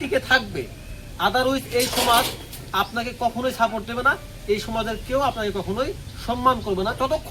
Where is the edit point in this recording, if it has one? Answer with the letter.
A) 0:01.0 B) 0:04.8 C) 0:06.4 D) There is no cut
D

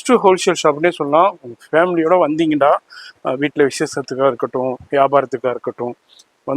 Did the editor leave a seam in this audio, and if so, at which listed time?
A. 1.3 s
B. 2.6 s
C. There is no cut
C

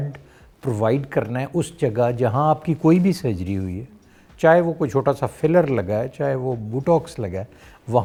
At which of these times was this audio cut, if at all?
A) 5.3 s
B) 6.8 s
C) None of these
C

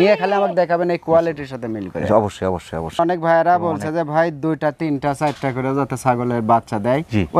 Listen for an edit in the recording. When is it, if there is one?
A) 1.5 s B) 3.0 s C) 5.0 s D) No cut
B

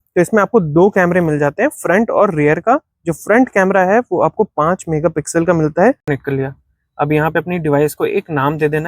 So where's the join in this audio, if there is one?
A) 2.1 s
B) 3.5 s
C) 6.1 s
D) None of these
C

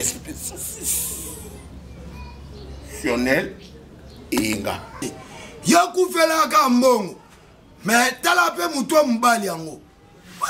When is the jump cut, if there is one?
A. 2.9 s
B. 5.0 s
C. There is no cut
B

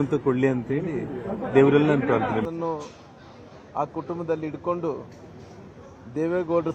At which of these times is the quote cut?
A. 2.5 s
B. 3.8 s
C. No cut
A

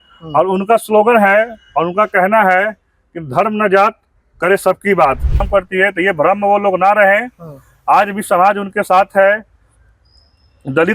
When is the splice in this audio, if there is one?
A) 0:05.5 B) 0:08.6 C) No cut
A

